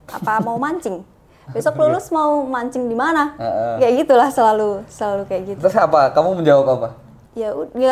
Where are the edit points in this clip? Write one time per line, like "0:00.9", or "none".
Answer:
none